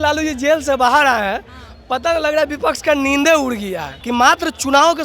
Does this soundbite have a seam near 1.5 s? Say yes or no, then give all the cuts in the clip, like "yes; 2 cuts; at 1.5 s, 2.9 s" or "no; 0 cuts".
no; 1 cut; at 3.9 s